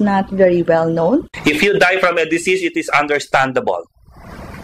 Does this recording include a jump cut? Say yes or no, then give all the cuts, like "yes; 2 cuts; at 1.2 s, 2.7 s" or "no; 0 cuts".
yes; 1 cut; at 1.3 s